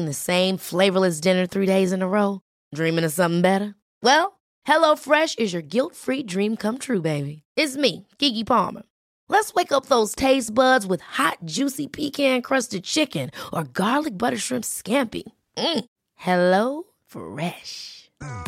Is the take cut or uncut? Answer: uncut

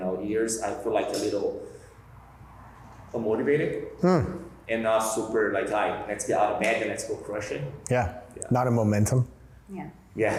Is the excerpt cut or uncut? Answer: uncut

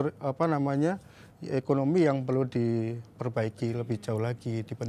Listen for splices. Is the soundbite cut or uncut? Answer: uncut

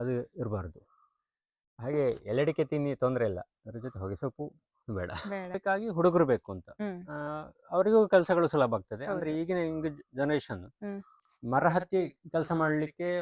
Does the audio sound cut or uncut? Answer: cut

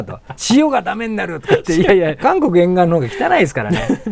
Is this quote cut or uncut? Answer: cut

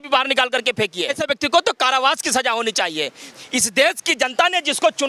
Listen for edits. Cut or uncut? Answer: cut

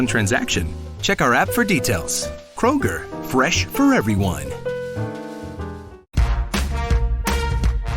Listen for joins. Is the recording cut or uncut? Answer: cut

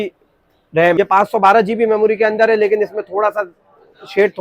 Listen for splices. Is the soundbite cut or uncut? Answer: cut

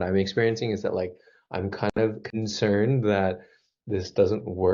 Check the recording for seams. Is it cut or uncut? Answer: uncut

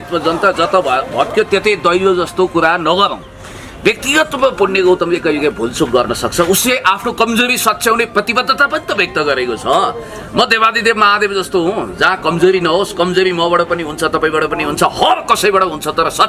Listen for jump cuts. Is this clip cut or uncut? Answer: uncut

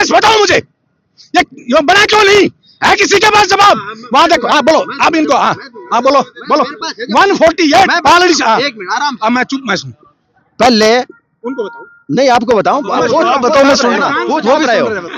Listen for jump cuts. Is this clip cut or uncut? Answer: uncut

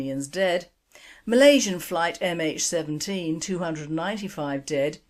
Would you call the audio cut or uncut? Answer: uncut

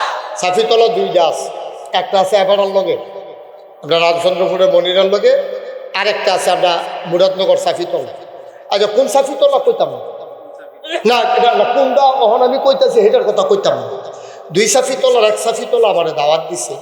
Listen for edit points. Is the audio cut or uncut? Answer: uncut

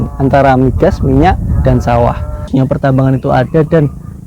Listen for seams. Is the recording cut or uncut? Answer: cut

